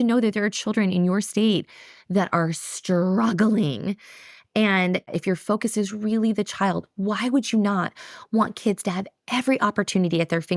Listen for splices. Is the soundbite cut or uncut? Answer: cut